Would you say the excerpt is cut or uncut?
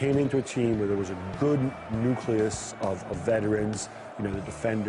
uncut